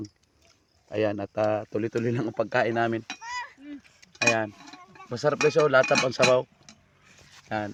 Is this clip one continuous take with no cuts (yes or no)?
yes